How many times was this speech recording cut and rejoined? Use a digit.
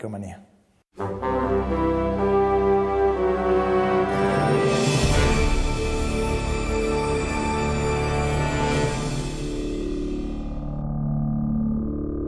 1